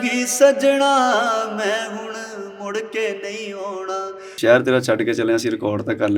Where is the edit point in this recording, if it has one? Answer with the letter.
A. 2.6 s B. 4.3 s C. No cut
B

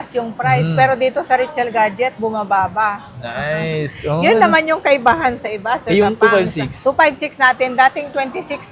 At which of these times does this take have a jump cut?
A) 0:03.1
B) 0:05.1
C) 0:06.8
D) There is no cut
D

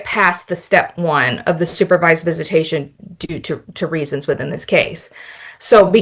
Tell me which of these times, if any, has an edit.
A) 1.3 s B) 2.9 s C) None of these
C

